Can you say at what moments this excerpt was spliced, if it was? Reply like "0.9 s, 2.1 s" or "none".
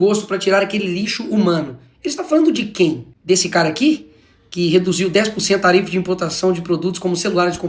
6.5 s